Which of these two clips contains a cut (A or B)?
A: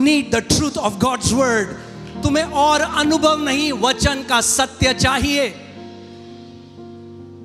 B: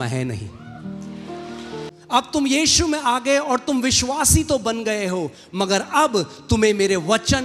B